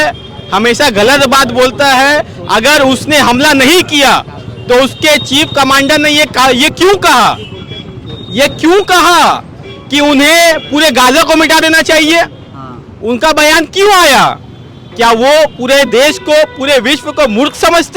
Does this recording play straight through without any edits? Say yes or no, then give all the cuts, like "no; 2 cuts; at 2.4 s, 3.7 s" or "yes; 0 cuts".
yes; 0 cuts